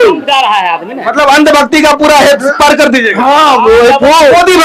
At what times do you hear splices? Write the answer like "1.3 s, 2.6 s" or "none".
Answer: none